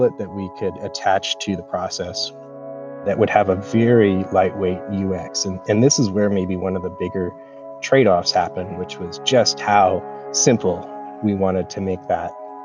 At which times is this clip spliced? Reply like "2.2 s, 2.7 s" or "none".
none